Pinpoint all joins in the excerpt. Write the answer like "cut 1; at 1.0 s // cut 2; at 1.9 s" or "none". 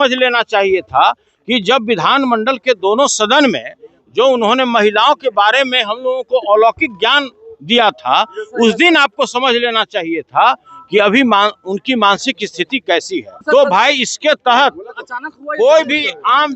cut 1; at 13.4 s

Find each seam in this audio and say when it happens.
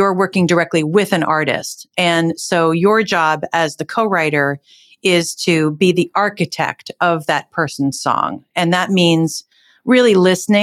none

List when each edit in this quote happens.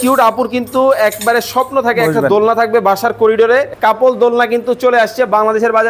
cut 1; at 3.7 s

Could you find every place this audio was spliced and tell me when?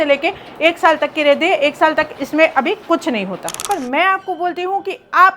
cut 1; at 3.6 s

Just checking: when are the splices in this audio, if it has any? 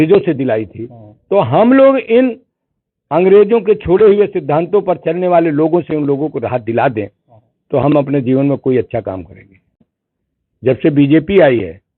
cut 1; at 9.8 s

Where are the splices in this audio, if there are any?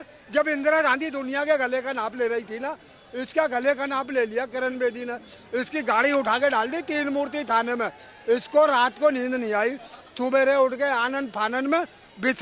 none

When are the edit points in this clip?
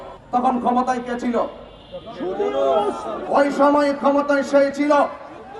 cut 1; at 3.3 s

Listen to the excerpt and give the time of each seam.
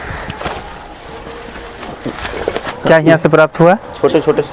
none

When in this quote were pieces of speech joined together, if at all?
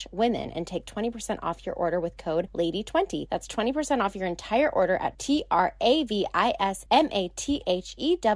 cut 1; at 2.5 s // cut 2; at 3.2 s // cut 3; at 6.8 s

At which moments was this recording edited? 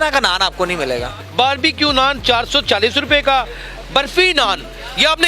cut 1; at 1.2 s

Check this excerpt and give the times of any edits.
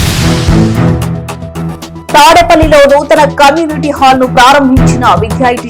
cut 1; at 2.1 s

